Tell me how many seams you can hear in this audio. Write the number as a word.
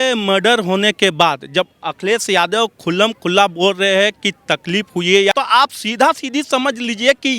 one